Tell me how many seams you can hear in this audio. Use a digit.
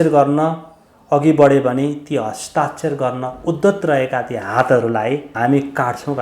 1